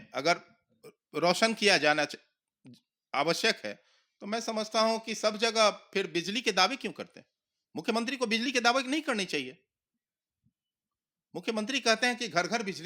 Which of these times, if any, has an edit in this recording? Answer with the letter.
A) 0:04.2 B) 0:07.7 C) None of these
C